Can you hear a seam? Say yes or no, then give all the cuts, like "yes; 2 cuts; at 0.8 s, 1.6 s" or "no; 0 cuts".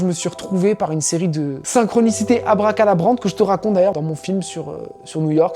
yes; 2 cuts; at 1.6 s, 3.9 s